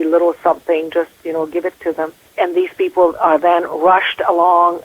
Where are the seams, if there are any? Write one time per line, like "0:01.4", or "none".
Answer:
0:02.2